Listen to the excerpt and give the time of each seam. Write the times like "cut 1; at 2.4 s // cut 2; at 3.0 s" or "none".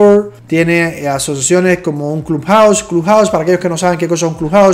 none